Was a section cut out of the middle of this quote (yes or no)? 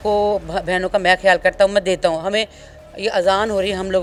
no